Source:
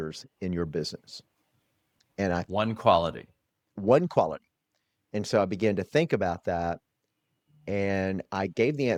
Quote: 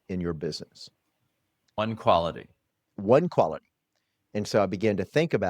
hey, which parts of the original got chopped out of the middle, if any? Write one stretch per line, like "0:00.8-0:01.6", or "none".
0:02.1-0:02.6